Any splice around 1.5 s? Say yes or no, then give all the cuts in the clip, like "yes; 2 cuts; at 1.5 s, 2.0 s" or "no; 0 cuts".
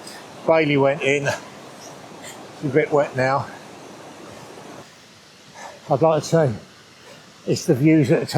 no; 1 cut; at 4.8 s